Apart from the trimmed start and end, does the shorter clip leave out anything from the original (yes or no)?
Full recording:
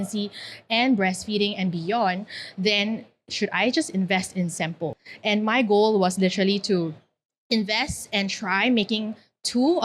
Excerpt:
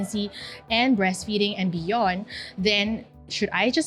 no